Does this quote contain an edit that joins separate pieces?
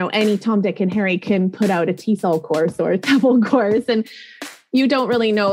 no; 0 cuts

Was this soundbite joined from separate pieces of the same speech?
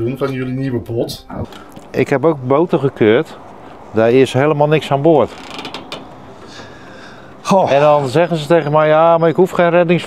yes; 1 cut; at 1.4 s

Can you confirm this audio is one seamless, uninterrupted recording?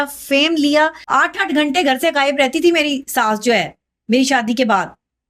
no; 1 cut; at 1.0 s

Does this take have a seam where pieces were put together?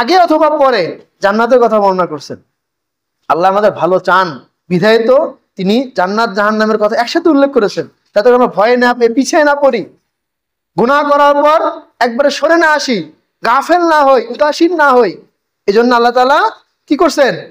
no; 0 cuts

